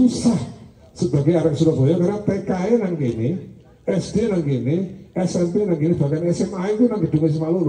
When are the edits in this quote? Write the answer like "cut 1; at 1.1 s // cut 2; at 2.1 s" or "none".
none